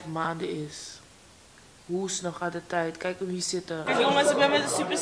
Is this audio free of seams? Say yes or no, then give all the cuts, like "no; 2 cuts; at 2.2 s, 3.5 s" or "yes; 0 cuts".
no; 1 cut; at 3.8 s